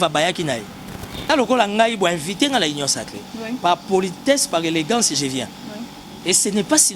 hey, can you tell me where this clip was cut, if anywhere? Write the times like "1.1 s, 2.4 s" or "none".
none